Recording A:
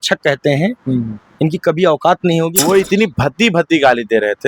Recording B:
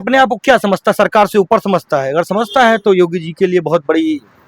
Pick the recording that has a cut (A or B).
A